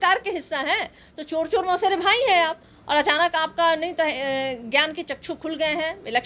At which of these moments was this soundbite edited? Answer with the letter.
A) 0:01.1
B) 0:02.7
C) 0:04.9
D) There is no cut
B